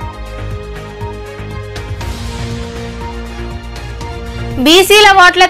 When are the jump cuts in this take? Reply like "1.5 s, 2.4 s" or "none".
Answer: 1.9 s